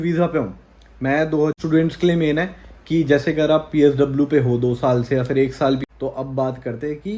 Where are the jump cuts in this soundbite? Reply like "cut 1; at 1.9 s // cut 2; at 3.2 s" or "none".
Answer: cut 1; at 1.5 s // cut 2; at 5.8 s